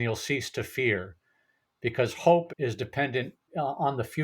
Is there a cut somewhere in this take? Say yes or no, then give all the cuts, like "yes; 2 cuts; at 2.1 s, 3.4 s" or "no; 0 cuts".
yes; 2 cuts; at 2.5 s, 3.5 s